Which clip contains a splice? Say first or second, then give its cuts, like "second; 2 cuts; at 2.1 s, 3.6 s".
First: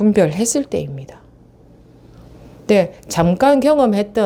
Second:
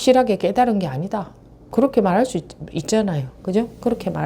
second; 1 cut; at 1.7 s